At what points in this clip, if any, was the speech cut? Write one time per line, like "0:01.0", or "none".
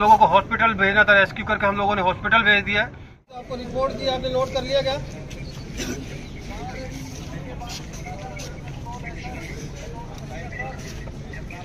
0:03.1